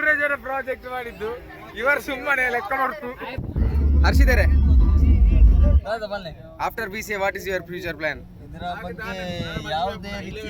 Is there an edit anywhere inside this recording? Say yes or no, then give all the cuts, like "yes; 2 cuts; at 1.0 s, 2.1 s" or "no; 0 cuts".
yes; 1 cut; at 3.3 s